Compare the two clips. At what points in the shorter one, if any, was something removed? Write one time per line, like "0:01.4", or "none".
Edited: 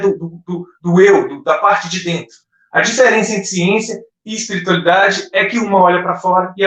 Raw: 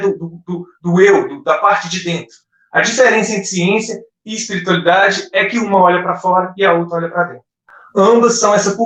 none